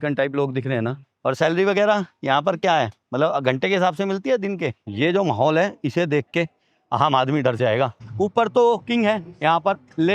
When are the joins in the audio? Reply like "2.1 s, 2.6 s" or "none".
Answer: 1.0 s, 3.0 s, 4.8 s, 8.0 s